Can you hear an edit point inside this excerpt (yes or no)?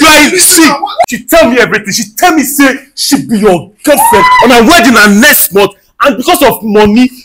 yes